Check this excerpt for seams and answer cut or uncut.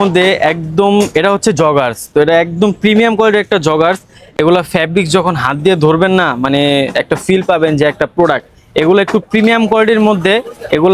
uncut